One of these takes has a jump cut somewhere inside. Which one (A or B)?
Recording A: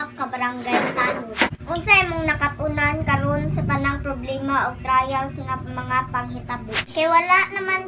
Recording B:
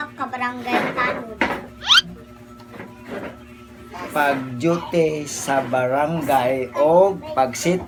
A